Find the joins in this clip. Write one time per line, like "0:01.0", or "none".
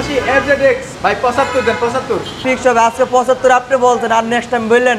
0:00.9
0:02.4